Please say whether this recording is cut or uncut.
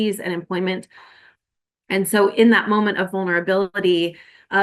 cut